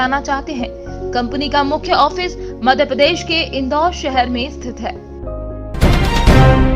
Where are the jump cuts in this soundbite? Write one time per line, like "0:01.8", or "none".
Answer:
0:05.8